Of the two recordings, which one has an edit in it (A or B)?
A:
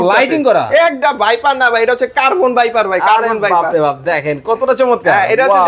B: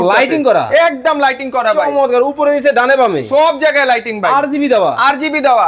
A